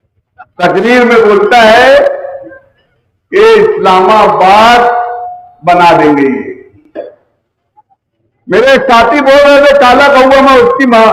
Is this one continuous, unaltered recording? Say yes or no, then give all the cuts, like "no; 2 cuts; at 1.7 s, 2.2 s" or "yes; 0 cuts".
no; 1 cut; at 7.0 s